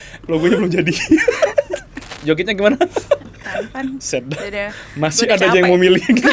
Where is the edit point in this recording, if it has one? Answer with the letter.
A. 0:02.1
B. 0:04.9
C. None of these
A